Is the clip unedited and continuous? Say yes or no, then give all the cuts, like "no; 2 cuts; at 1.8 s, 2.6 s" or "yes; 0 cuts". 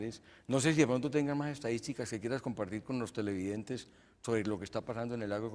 no; 1 cut; at 1.3 s